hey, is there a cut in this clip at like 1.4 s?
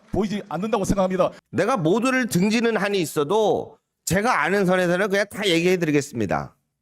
yes; 1 cut; at 1.4 s

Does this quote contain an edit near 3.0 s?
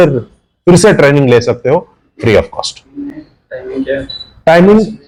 no; 0 cuts

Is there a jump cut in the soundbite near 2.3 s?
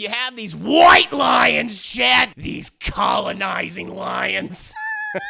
yes; 1 cut; at 2.3 s

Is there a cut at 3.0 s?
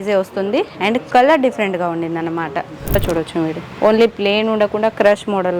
yes; 1 cut; at 3.0 s

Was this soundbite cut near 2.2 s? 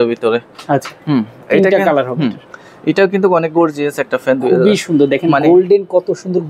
no; 0 cuts

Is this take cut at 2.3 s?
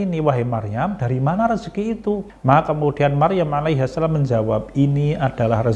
yes; 1 cut; at 2.3 s

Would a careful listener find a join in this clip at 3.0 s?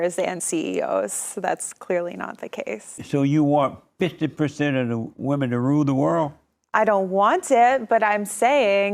yes; 1 cut; at 3.0 s

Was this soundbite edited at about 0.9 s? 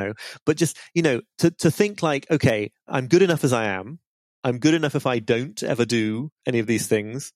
no; 2 cuts; at 2.8 s, 6.3 s

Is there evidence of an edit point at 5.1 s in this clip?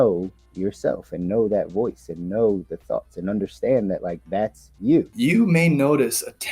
yes; 1 cut; at 5.1 s

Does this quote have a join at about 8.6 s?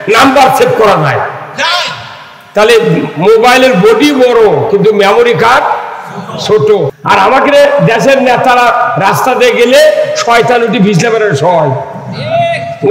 no; 1 cut; at 7.0 s

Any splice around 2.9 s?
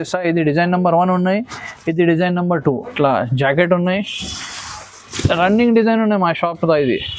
yes; 1 cut; at 2.9 s

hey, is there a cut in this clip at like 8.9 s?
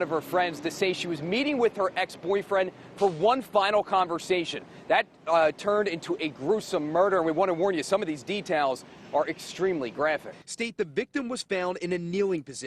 no; 1 cut; at 10.4 s

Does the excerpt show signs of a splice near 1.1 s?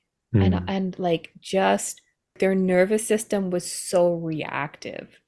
no; 1 cut; at 2.3 s

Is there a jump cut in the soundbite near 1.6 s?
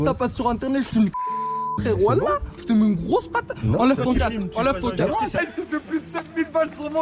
no; 1 cut; at 5.3 s

